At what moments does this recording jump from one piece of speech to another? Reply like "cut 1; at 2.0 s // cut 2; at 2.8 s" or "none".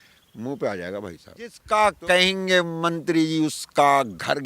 cut 1; at 1.6 s